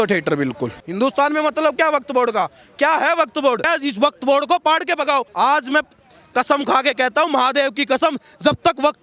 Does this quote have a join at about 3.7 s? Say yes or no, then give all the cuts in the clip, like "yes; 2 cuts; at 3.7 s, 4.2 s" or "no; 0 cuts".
yes; 3 cuts; at 0.8 s, 3.7 s, 5.3 s